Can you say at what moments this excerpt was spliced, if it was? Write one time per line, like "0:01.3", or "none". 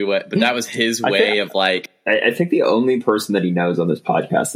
0:01.9